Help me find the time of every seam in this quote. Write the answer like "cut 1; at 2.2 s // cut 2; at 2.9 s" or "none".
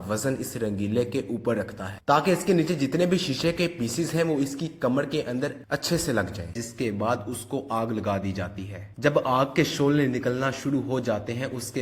cut 1; at 6.6 s